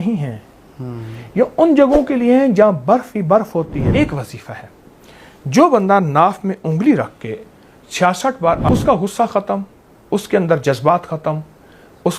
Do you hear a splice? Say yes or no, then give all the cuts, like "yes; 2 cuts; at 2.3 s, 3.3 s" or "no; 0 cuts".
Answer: yes; 2 cuts; at 3.9 s, 8.7 s